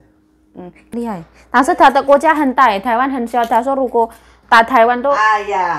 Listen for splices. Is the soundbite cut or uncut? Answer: cut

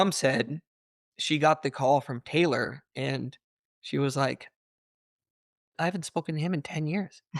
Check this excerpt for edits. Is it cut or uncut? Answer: uncut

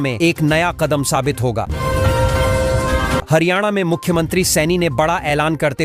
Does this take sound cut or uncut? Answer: cut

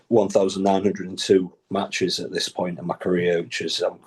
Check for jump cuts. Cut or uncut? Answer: uncut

